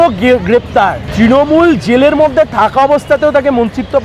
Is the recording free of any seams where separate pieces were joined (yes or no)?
no